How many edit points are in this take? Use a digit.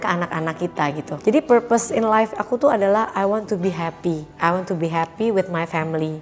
2